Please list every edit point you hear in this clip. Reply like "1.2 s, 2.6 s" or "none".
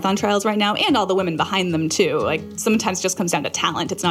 2.5 s